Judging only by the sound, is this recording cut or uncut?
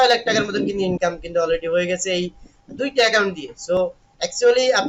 cut